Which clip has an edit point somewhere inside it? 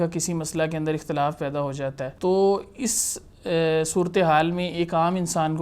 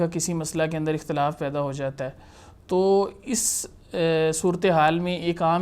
first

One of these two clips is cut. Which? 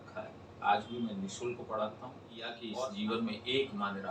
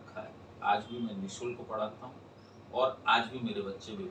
first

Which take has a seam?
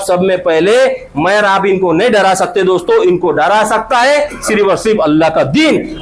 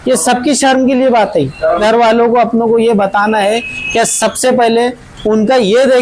second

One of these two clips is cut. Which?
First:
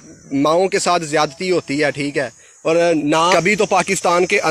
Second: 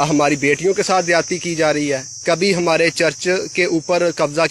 first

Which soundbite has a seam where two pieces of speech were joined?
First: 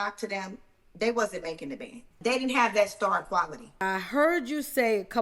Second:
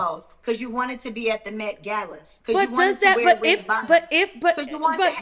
first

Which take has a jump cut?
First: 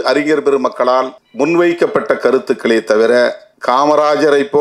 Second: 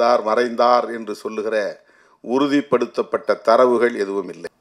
first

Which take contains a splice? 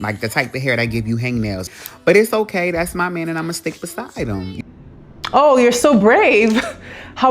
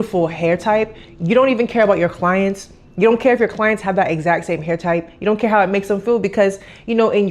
first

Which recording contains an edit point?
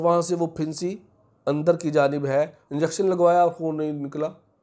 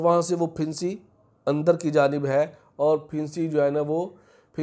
first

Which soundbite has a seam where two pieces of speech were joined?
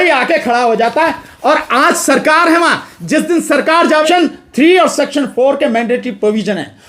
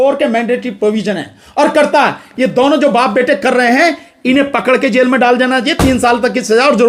first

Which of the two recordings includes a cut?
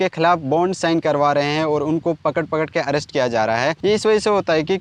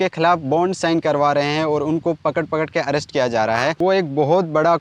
second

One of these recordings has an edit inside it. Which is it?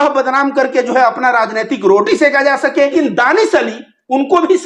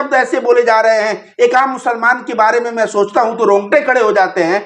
first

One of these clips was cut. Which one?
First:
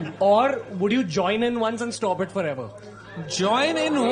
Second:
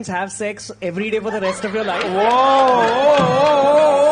first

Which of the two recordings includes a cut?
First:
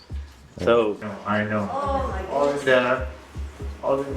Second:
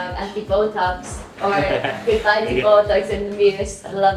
first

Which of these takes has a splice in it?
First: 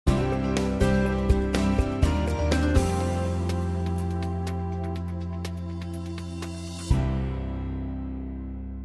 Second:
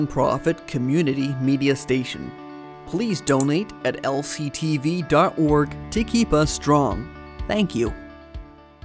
second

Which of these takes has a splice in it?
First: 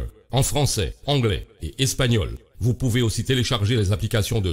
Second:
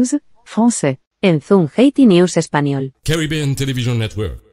second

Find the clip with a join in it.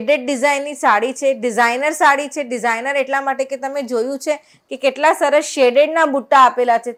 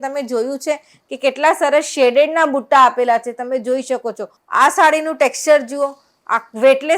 second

